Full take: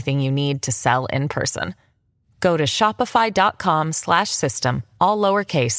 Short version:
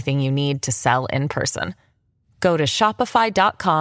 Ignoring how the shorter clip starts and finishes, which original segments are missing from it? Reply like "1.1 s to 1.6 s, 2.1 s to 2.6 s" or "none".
none